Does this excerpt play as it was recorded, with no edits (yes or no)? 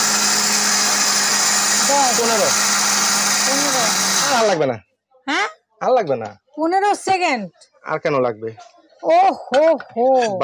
yes